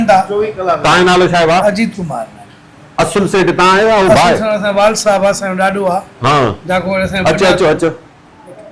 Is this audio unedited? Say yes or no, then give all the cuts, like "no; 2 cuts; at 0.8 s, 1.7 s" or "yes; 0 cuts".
yes; 0 cuts